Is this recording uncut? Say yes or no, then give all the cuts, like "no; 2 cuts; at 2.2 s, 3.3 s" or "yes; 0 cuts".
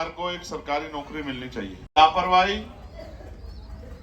no; 1 cut; at 1.9 s